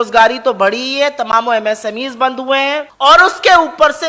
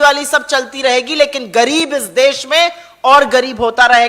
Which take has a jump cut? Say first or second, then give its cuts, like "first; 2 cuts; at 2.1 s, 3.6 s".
first; 1 cut; at 2.9 s